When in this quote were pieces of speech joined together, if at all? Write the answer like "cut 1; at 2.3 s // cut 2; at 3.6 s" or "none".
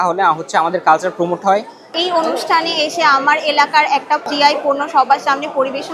cut 1; at 1.9 s // cut 2; at 4.2 s